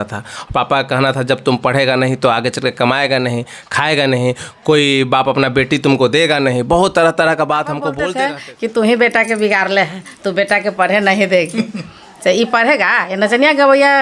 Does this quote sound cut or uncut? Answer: cut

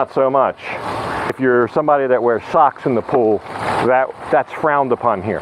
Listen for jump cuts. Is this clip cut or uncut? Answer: cut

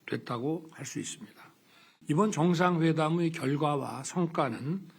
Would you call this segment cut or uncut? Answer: cut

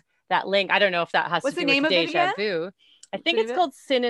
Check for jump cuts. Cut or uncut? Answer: uncut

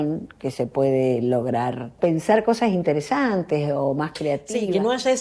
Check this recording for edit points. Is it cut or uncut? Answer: cut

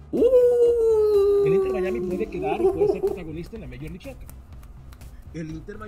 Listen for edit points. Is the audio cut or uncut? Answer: uncut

